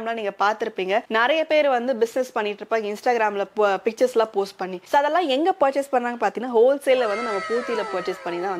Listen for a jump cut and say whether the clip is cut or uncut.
uncut